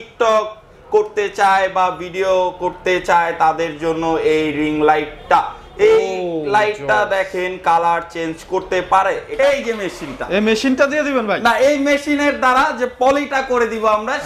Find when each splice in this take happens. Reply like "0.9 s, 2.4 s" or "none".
9.3 s